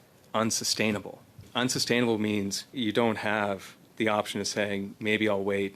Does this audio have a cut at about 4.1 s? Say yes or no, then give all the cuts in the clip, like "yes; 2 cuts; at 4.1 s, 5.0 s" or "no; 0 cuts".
no; 2 cuts; at 1.5 s, 2.7 s